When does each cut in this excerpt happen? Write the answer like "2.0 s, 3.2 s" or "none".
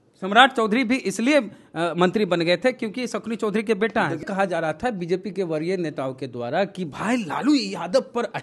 4.2 s